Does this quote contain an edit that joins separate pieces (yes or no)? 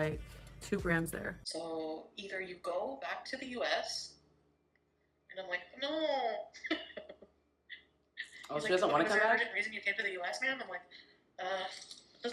yes